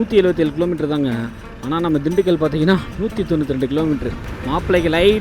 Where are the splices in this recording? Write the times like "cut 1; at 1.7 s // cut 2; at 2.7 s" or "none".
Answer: cut 1; at 4.2 s